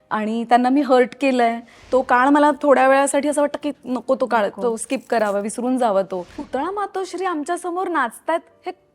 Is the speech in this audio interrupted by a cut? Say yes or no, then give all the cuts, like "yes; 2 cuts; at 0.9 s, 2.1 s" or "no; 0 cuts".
yes; 2 cuts; at 1.7 s, 6.4 s